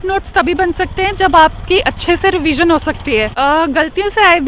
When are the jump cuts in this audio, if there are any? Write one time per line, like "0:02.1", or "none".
0:03.3